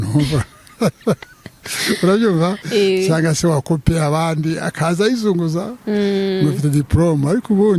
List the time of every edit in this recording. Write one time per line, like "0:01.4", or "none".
none